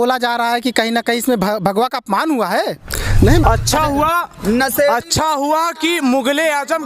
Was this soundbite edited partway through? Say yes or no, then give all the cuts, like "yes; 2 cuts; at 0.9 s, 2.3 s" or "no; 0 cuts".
yes; 1 cut; at 3.4 s